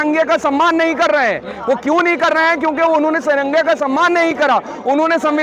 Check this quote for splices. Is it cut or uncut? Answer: uncut